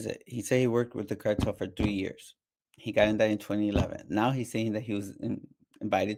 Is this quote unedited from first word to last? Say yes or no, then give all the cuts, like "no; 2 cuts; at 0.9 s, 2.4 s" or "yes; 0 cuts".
yes; 0 cuts